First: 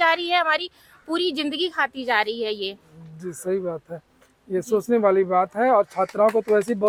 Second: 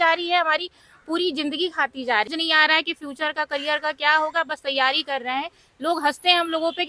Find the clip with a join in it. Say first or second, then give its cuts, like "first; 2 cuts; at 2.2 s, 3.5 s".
second; 1 cut; at 2.3 s